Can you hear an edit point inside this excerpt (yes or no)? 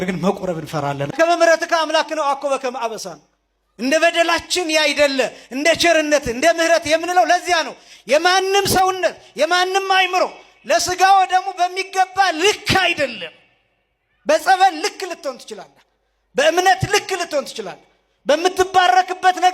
yes